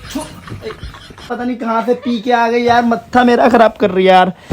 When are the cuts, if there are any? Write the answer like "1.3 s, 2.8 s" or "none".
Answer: 1.3 s